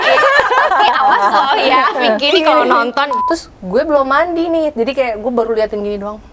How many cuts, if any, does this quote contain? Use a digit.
2